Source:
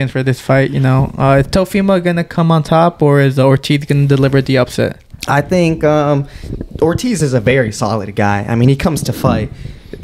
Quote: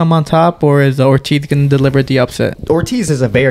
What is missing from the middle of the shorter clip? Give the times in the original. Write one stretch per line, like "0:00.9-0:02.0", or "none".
0:05.0-0:06.7